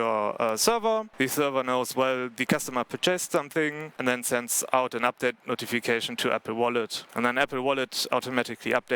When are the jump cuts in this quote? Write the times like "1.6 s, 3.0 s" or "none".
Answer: 1.1 s, 3.9 s, 7.0 s